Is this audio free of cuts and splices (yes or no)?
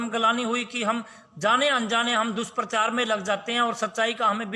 yes